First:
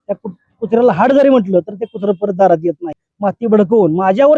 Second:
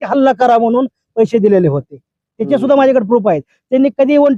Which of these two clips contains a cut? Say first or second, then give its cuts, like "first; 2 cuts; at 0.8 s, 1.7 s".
first; 1 cut; at 3.0 s